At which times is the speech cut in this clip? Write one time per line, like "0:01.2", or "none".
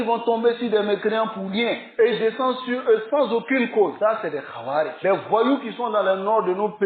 none

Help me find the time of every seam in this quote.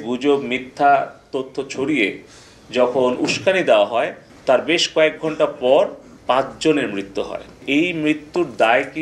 0:04.2
0:06.1
0:07.6

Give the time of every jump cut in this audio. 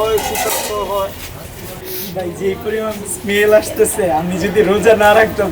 0:01.9

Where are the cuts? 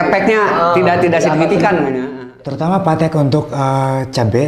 0:02.1

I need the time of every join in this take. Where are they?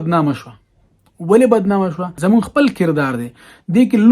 0:02.1

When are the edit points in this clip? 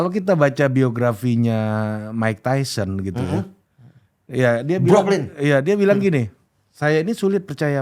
none

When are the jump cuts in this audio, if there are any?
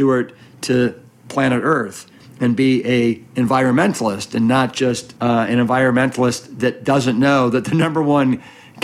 0:05.1

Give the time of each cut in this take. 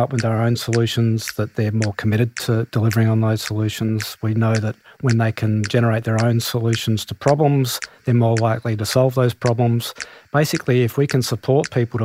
none

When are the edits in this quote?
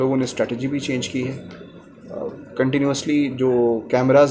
none

